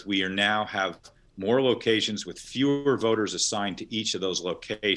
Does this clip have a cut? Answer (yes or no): no